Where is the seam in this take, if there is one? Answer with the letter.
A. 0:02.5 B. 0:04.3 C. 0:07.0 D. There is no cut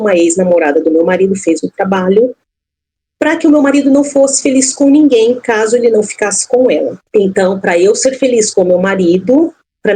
C